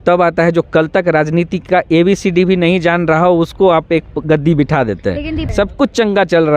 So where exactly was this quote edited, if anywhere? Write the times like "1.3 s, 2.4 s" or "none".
5.5 s